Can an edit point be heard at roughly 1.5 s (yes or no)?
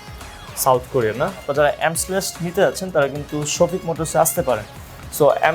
yes